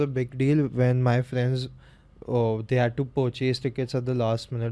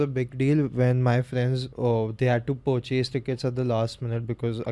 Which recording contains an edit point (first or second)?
second